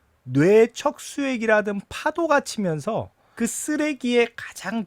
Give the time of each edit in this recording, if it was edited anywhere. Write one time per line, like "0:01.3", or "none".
0:03.3